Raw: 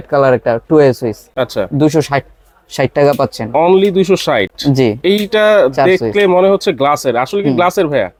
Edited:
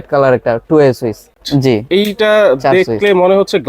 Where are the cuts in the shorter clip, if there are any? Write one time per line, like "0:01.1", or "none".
0:01.4

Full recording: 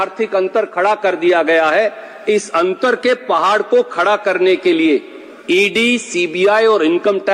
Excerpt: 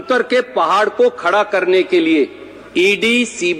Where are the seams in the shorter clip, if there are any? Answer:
none

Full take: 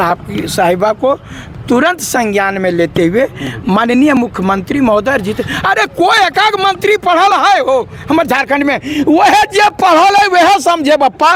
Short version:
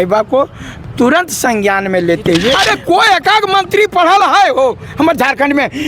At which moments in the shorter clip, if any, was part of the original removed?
0:02.6

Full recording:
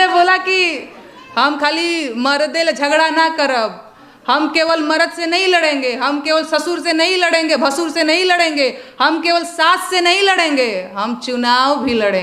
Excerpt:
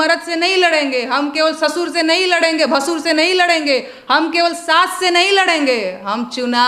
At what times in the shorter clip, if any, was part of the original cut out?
none

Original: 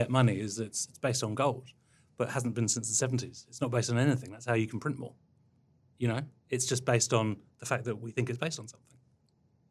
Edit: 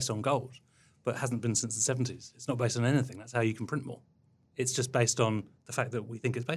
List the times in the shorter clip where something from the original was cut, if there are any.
0:04.4

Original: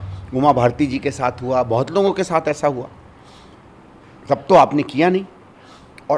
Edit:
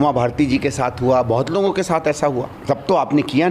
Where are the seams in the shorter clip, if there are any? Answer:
0:02.5

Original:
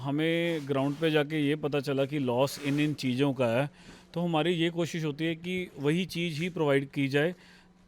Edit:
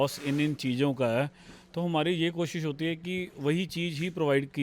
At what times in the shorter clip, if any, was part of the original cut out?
none

